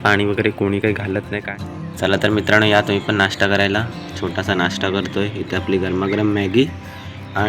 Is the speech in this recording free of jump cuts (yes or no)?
no